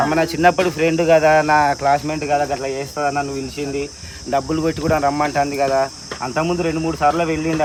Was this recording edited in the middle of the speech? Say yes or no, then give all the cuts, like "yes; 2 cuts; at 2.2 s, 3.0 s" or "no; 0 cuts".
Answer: no; 0 cuts